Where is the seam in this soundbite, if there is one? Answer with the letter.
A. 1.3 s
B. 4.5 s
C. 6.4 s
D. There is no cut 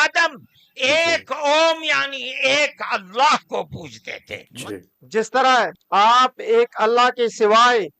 B